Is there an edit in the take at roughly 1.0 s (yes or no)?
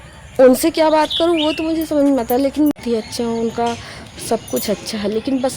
no